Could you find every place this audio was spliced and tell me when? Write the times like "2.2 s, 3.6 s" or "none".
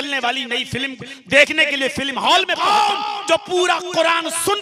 2.5 s